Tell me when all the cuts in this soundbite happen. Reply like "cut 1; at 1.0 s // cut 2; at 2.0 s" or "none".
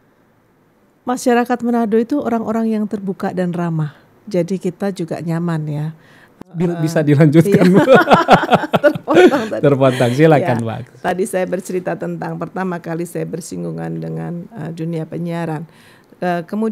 cut 1; at 6.6 s